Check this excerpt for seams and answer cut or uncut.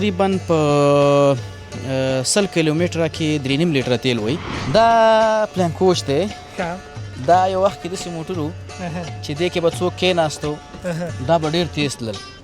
cut